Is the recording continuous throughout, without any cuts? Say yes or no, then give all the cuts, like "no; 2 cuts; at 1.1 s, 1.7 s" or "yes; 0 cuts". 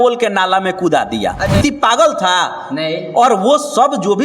no; 1 cut; at 1.6 s